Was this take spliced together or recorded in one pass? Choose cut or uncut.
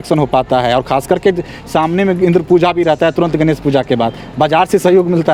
uncut